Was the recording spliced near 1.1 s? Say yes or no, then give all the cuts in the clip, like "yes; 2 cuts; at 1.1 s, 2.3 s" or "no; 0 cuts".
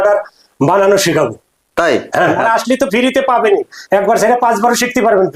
no; 1 cut; at 2.4 s